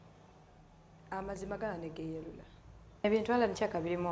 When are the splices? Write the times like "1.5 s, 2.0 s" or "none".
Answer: 3.0 s